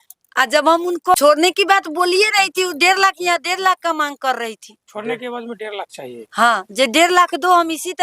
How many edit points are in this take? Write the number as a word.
one